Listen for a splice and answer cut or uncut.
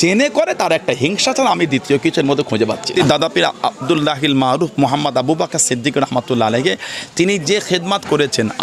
cut